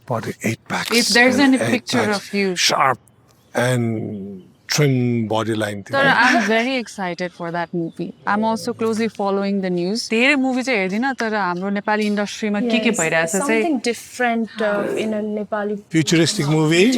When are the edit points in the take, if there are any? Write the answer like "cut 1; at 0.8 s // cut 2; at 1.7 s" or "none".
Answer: none